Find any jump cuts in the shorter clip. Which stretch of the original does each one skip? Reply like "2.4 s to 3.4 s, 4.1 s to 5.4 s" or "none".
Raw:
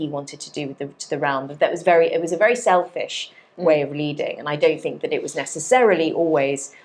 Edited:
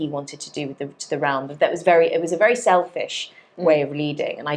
none